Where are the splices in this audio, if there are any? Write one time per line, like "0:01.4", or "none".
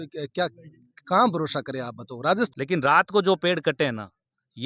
0:02.5